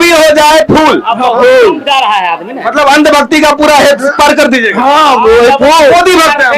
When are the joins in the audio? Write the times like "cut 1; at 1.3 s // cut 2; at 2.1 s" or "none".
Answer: none